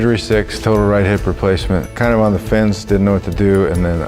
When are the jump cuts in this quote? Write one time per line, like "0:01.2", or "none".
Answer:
0:01.9